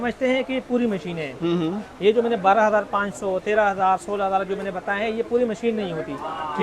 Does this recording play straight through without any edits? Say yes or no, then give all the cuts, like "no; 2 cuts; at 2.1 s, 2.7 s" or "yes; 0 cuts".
yes; 0 cuts